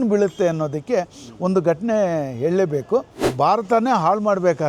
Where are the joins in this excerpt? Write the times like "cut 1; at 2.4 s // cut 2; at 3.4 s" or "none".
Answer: cut 1; at 3.3 s